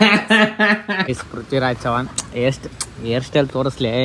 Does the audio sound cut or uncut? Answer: cut